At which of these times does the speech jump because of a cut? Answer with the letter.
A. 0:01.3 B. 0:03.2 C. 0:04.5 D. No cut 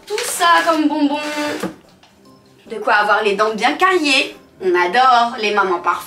D